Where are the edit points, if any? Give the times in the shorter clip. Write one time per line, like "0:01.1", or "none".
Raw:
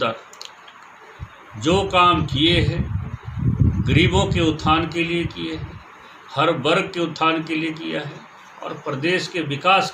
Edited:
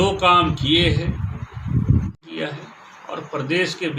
0:02.2